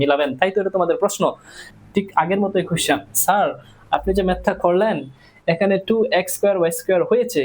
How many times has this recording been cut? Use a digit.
1